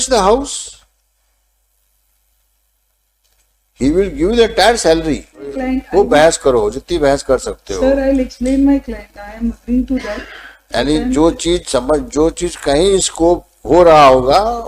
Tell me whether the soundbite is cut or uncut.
cut